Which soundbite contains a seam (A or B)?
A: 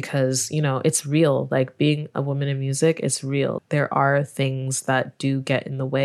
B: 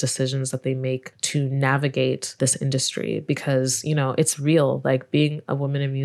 B